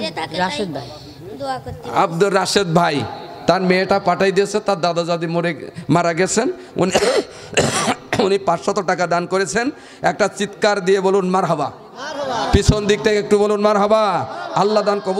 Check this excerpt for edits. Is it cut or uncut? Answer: uncut